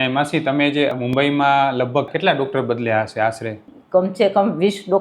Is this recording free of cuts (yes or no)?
no